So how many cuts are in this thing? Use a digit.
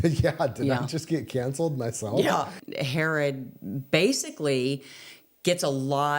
1